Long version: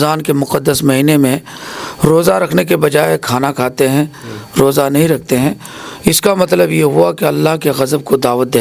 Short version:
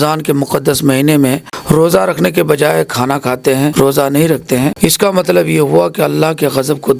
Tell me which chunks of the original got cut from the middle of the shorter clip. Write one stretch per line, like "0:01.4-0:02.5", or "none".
0:01.5-0:01.8
0:04.1-0:04.5
0:05.5-0:06.0